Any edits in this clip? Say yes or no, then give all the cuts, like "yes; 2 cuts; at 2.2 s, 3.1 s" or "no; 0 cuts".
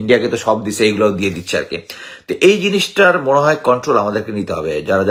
no; 0 cuts